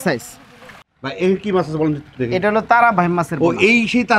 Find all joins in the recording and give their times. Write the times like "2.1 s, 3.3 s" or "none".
1.0 s